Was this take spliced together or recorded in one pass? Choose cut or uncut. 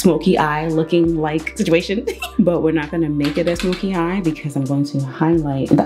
uncut